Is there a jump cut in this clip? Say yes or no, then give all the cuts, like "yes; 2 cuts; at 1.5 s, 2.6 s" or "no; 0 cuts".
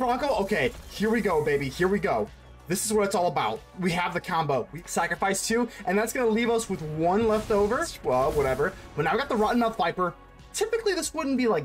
yes; 2 cuts; at 4.7 s, 7.9 s